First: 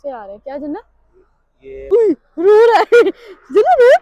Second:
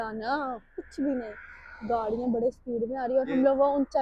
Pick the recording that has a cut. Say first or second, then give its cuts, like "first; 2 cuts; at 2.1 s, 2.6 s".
first; 1 cut; at 1.9 s